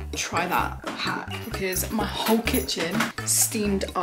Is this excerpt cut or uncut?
cut